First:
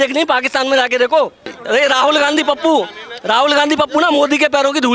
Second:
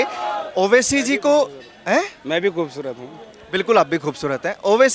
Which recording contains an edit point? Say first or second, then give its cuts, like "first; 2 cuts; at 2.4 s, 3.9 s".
first; 1 cut; at 1.6 s